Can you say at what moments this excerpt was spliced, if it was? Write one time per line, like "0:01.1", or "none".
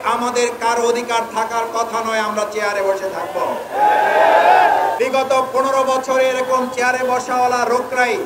0:05.0